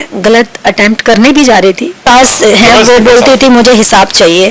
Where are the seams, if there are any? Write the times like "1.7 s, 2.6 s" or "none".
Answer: 2.0 s